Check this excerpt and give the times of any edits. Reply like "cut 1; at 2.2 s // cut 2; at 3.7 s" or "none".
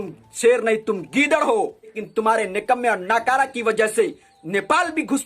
cut 1; at 2.0 s

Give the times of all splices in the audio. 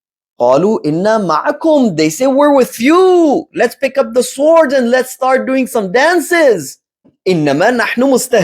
cut 1; at 7.1 s

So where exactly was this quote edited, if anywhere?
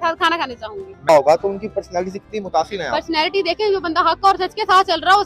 cut 1; at 1.0 s

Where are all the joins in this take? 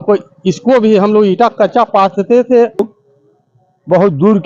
cut 1; at 2.9 s

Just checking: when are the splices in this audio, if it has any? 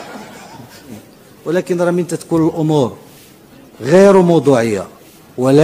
cut 1; at 1.1 s

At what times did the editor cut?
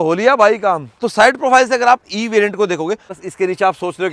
cut 1; at 0.9 s // cut 2; at 3.2 s

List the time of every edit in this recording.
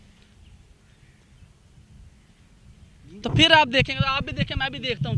cut 1; at 3.1 s

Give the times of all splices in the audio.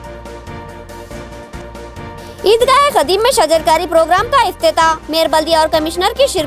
none

